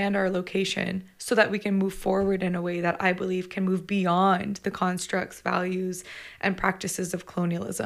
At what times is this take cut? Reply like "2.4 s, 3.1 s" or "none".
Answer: none

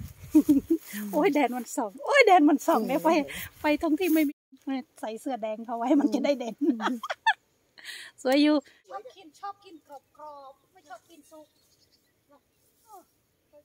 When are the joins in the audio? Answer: 4.3 s, 8.8 s

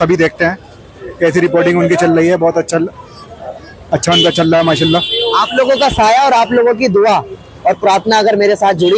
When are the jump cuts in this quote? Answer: none

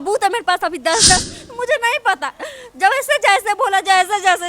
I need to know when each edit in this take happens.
1.2 s

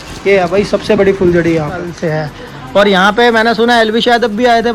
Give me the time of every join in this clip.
1.9 s

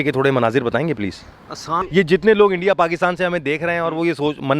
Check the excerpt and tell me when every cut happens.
1.8 s

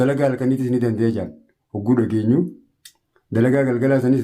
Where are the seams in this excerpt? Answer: none

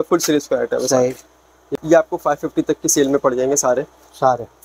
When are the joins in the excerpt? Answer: 1.6 s

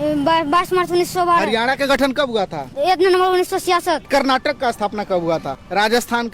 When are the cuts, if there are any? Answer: 2.7 s, 4.1 s, 5.5 s

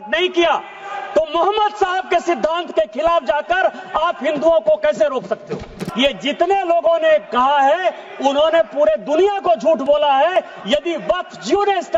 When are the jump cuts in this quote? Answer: 5.8 s

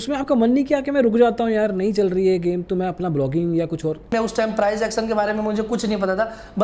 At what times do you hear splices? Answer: 4.1 s

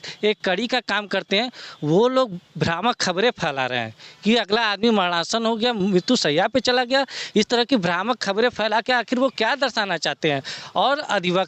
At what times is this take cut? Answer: none

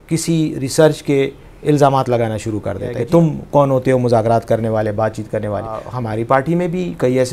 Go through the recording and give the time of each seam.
3.0 s, 5.9 s

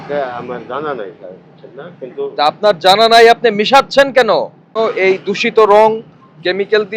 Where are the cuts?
4.7 s

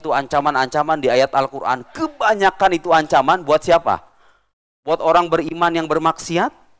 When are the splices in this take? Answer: none

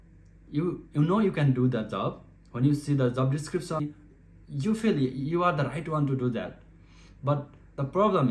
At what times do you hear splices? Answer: 3.8 s

